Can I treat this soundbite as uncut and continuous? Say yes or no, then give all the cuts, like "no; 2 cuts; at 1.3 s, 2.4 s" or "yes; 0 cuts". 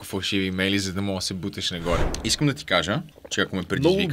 no; 2 cuts; at 2.1 s, 3.2 s